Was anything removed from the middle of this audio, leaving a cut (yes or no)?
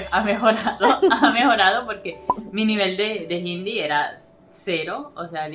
no